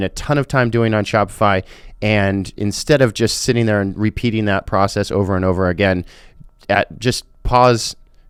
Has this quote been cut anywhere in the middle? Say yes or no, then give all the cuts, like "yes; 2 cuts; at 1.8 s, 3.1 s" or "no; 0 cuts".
no; 0 cuts